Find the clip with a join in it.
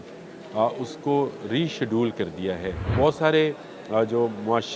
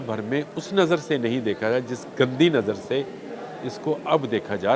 first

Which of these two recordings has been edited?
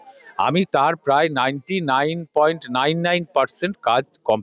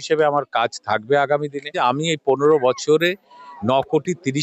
second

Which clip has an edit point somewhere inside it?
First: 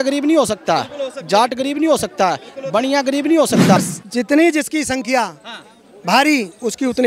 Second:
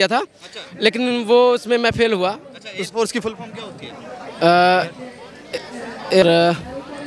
first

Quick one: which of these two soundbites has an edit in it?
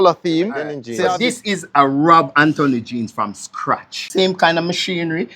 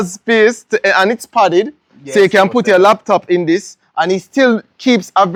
first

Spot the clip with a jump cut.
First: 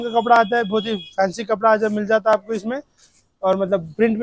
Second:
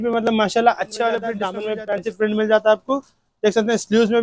second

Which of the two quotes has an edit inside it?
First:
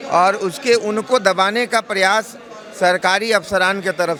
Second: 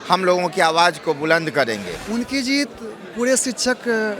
second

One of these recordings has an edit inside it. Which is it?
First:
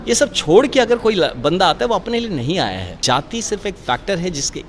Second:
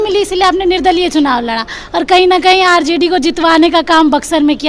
first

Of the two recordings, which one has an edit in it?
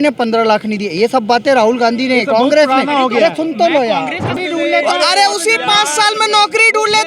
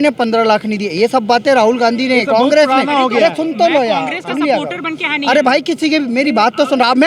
first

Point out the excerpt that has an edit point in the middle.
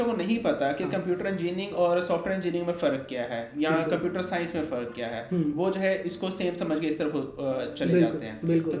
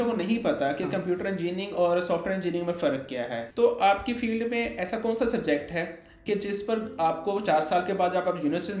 second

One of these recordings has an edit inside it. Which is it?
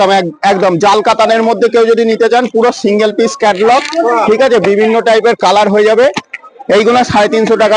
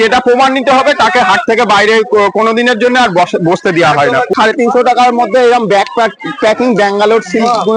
second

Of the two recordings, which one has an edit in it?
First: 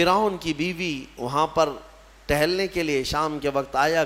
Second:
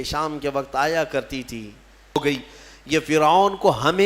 second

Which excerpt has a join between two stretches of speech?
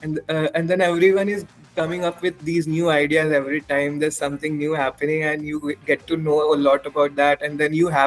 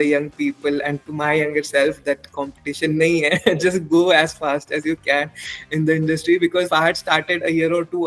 second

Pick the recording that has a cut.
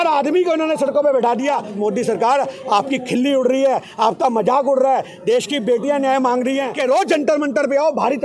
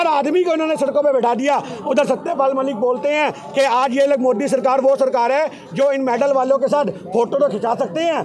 first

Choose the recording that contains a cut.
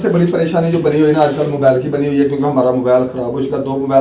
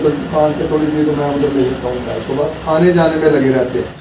second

